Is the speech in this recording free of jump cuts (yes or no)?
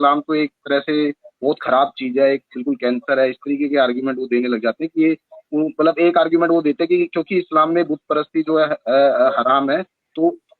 yes